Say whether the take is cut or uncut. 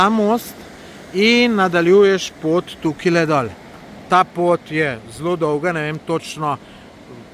uncut